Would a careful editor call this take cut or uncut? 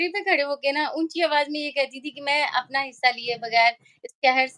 uncut